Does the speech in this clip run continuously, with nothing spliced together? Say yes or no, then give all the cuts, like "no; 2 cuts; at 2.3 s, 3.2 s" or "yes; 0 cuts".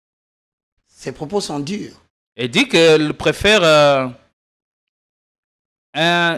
yes; 0 cuts